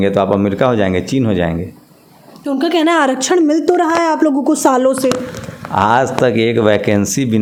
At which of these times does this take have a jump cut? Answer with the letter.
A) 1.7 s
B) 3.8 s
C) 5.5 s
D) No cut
D